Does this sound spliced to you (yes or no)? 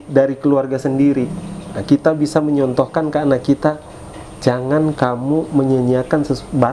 no